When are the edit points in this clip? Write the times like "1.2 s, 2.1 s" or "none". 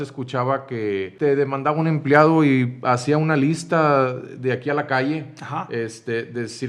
1.1 s